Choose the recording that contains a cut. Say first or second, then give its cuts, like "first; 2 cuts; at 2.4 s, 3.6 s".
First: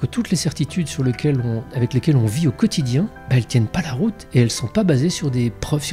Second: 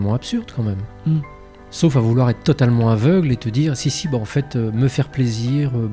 first; 1 cut; at 3.2 s